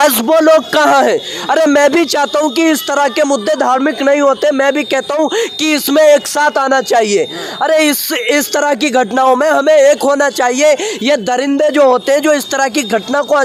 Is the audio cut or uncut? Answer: uncut